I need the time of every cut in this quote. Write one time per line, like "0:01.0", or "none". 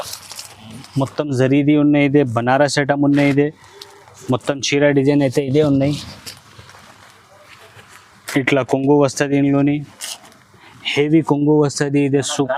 none